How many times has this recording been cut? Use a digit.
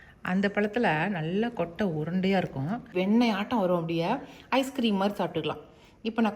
1